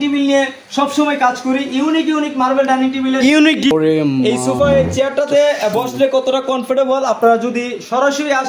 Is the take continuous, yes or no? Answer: no